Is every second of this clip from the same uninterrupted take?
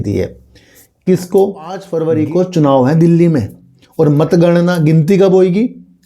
no; 1 cut; at 1.9 s

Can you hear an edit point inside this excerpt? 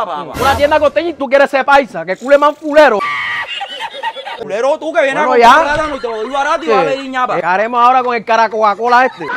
no; 0 cuts

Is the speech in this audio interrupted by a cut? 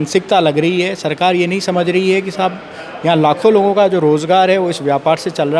no; 0 cuts

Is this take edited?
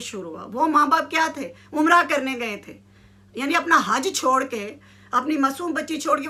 no; 0 cuts

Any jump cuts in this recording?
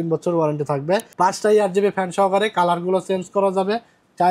yes; 1 cut; at 1.1 s

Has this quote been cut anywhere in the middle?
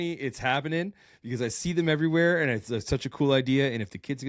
no; 0 cuts

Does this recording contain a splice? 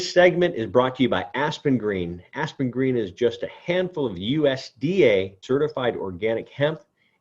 yes; 1 cut; at 5.4 s

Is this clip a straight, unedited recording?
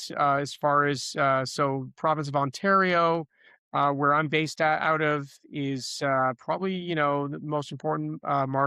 yes; 0 cuts

